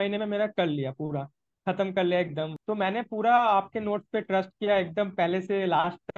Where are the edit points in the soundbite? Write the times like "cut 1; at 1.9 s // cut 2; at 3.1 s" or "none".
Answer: cut 1; at 2.5 s